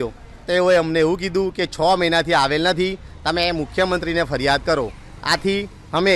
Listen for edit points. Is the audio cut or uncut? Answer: uncut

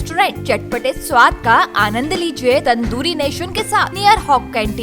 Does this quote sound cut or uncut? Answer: cut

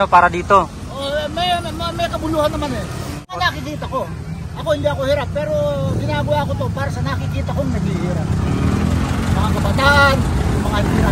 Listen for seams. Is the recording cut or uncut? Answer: cut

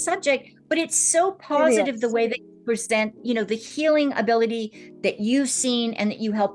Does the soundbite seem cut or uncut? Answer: uncut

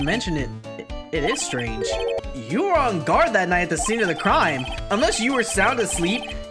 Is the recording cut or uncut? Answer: cut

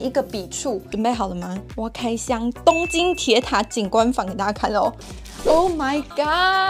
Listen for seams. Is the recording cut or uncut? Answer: cut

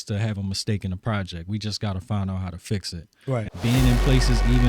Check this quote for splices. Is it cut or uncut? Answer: cut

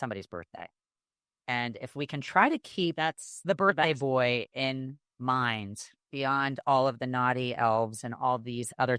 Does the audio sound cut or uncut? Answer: uncut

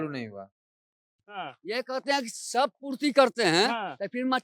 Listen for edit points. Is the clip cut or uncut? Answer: cut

